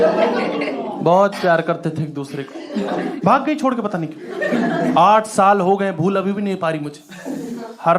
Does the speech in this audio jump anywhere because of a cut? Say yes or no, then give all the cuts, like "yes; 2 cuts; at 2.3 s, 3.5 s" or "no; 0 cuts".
yes; 1 cut; at 3.1 s